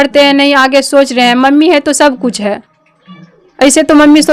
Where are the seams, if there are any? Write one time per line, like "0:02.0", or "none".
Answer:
none